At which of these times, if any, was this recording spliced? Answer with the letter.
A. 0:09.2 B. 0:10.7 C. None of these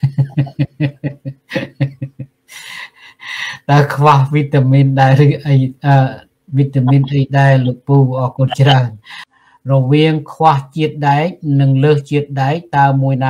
A